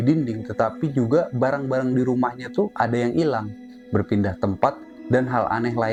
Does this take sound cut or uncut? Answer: uncut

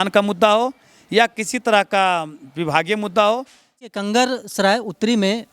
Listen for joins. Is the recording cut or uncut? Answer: cut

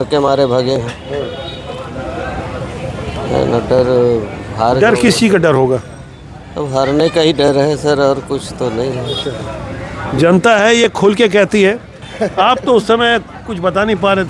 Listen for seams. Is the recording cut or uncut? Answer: uncut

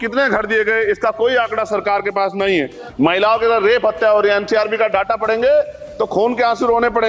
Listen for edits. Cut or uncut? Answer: cut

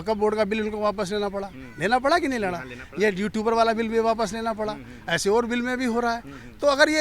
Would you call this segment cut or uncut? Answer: uncut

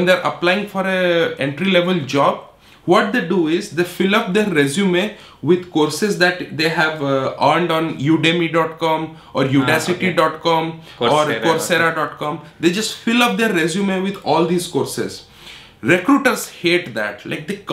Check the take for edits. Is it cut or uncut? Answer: uncut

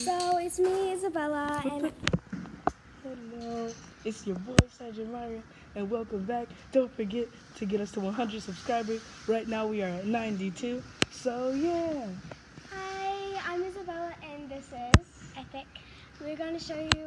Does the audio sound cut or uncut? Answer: uncut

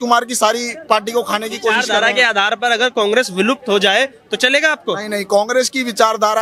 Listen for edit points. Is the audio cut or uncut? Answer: uncut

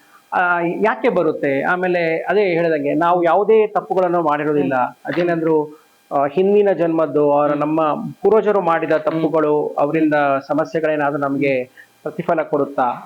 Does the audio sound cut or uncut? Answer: uncut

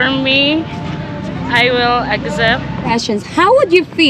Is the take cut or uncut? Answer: cut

